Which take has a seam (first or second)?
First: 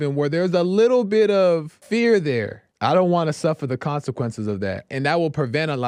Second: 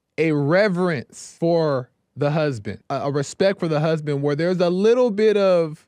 second